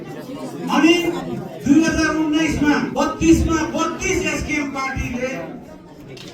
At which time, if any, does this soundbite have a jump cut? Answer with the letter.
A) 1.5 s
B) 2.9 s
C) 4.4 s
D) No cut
B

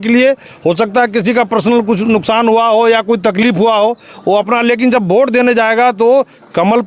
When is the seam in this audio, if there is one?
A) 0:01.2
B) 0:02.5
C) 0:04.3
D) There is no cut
D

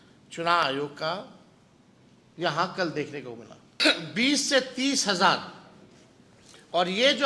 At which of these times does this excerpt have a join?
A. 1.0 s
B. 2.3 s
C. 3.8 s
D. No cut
C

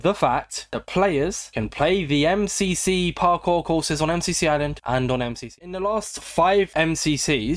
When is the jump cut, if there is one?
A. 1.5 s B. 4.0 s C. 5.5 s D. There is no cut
C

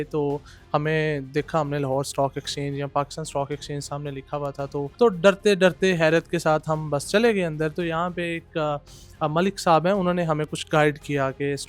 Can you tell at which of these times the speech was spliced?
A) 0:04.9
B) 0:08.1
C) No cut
A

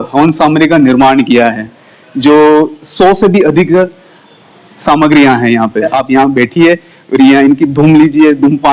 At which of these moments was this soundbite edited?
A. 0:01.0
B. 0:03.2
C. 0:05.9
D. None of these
C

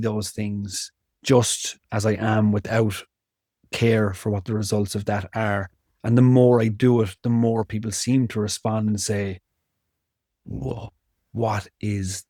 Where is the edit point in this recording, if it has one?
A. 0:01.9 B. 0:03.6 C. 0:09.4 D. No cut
D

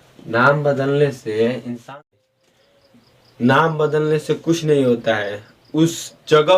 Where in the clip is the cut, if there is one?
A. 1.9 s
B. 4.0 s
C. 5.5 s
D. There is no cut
A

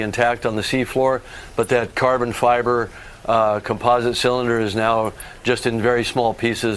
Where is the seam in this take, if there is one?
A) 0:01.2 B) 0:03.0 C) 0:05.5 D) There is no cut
D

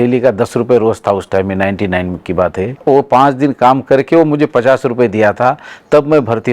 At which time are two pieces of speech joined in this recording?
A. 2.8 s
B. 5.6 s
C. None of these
A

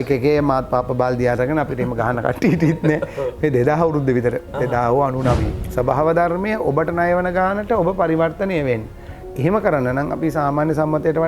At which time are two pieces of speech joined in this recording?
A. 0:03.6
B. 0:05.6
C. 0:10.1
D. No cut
B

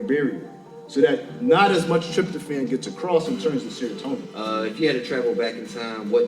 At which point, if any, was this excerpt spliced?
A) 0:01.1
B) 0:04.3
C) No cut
B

